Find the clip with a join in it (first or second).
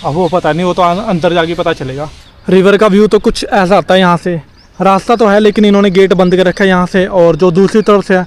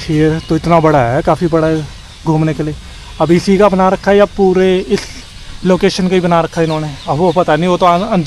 first